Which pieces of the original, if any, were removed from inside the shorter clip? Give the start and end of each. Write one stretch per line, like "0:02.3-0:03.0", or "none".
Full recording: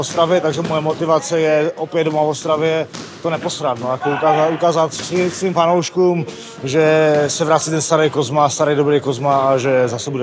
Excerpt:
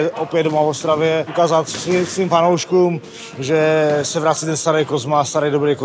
0:02.9-0:04.6